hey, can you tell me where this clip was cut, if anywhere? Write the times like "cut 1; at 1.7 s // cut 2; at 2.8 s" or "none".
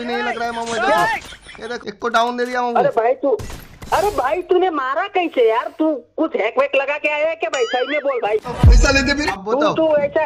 cut 1; at 1.7 s // cut 2; at 9.4 s